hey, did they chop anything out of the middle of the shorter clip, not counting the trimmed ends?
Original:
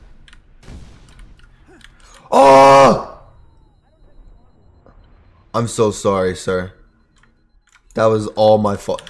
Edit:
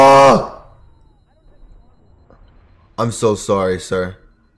no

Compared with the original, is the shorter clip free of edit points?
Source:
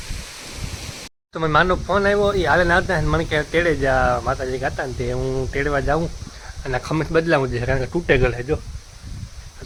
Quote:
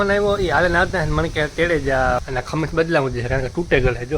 no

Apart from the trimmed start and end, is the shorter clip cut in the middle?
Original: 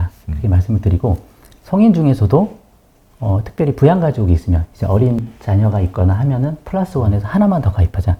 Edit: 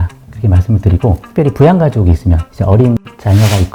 yes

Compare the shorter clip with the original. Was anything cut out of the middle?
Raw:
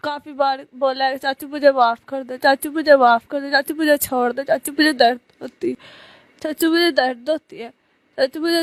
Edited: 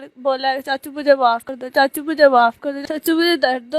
yes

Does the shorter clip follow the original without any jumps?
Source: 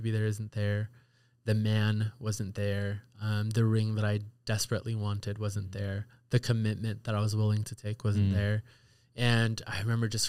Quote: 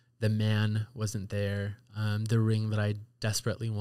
yes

